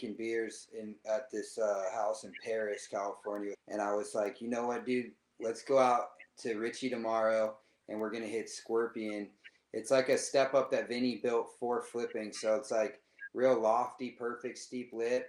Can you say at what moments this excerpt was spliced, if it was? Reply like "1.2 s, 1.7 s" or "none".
3.6 s